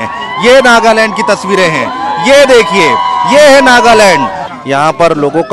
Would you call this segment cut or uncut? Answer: cut